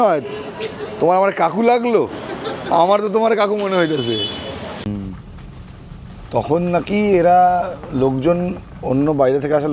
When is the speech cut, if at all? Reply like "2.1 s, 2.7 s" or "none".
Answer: 4.9 s